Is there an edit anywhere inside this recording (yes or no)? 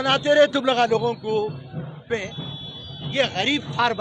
yes